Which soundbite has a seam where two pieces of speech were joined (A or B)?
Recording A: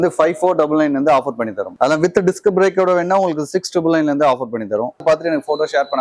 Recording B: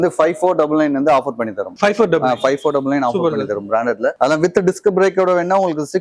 A